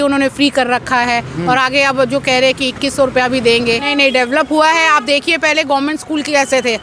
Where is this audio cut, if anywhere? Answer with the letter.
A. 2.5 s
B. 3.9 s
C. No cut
B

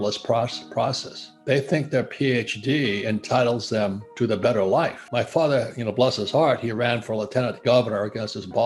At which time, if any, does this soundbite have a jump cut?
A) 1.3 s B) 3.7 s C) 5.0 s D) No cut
C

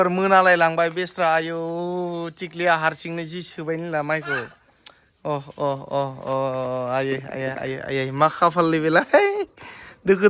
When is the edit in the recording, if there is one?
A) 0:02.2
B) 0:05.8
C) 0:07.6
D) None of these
D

